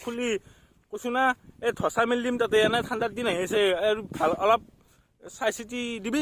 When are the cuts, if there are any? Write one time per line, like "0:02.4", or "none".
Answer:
none